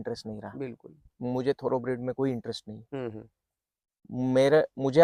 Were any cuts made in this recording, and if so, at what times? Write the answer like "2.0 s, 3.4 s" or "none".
none